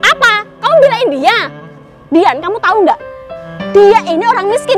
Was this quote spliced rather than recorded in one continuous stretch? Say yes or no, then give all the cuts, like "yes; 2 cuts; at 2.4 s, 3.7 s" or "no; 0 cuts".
no; 0 cuts